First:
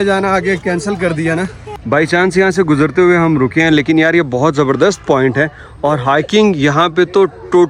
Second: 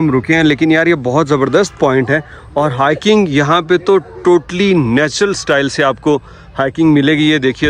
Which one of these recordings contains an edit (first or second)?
first